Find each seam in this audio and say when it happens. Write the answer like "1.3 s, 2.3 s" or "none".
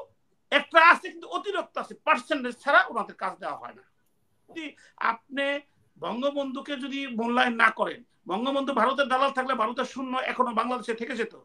4.6 s

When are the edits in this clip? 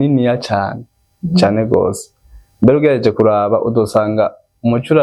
none

